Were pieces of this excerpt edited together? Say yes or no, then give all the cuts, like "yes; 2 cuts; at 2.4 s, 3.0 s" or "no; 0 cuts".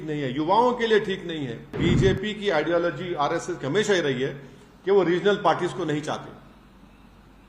yes; 1 cut; at 1.8 s